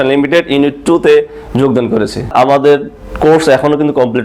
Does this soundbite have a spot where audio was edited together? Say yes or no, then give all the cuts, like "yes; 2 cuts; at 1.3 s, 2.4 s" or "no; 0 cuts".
yes; 1 cut; at 2.3 s